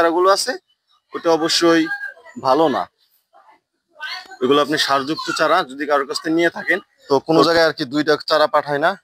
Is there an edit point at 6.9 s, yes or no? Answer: yes